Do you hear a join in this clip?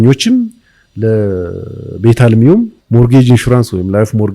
yes; 1 cut; at 2.8 s

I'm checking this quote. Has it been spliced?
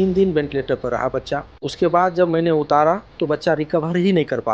yes; 2 cuts; at 1.7 s, 3.1 s

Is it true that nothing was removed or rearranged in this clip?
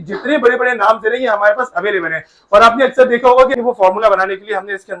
no; 1 cut; at 3.6 s

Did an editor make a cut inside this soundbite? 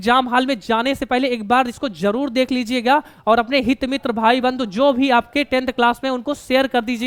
no; 0 cuts

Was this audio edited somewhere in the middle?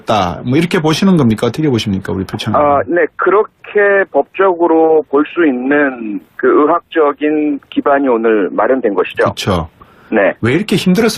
yes; 1 cut; at 5.6 s

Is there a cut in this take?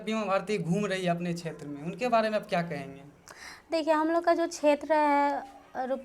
no; 0 cuts

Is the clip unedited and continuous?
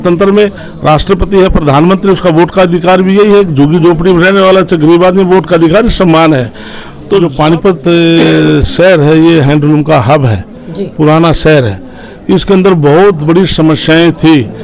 no; 1 cut; at 7.3 s

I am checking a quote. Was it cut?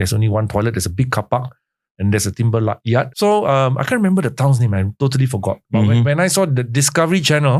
yes; 1 cut; at 3.1 s

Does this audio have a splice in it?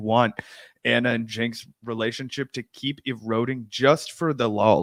no; 0 cuts

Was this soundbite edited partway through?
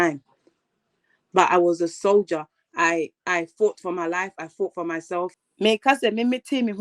yes; 1 cut; at 5.3 s

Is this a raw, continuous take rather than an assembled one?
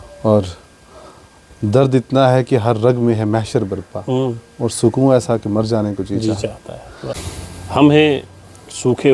no; 1 cut; at 7.3 s

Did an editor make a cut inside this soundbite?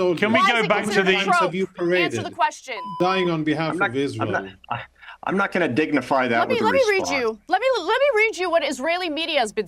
yes; 1 cut; at 2.9 s

